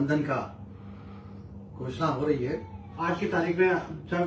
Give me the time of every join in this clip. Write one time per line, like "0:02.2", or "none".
0:02.9